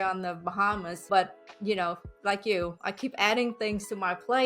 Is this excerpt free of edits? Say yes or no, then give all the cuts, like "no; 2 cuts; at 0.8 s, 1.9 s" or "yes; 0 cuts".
no; 1 cut; at 0.9 s